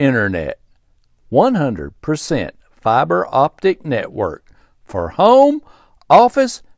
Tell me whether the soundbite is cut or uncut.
uncut